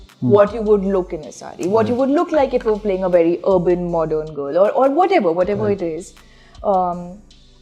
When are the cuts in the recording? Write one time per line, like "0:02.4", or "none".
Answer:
none

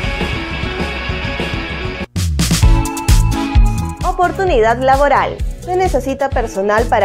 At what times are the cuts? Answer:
0:02.1

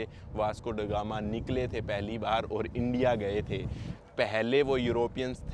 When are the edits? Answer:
none

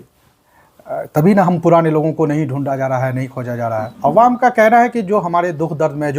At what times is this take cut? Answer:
0:03.9

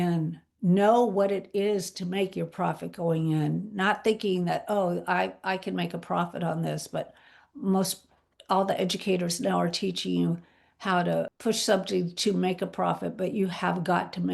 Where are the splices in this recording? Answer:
0:11.3

